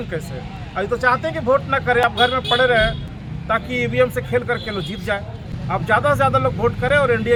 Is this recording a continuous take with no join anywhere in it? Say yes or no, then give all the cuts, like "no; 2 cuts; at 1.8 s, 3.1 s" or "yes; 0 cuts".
yes; 0 cuts